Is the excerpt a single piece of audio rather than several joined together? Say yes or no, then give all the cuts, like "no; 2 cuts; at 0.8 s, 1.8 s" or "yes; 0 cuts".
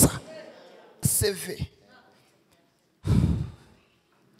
no; 1 cut; at 1.0 s